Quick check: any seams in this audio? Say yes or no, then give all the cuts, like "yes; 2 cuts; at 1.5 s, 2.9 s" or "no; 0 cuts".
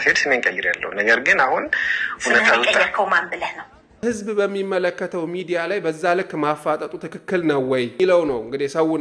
yes; 2 cuts; at 3.9 s, 7.9 s